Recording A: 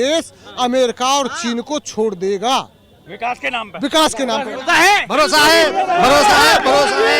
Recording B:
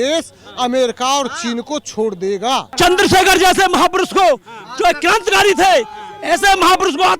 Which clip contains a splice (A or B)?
B